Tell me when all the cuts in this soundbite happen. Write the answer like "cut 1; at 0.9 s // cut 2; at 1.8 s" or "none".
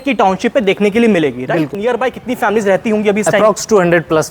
cut 1; at 1.7 s

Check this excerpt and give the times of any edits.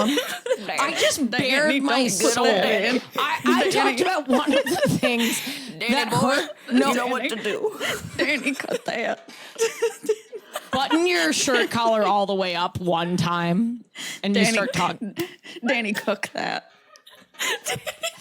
none

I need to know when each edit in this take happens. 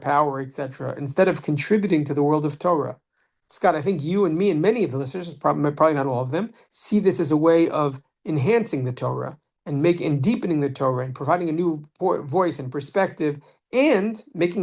none

